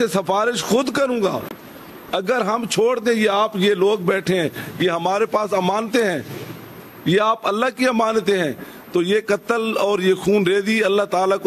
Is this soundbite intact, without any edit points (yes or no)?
yes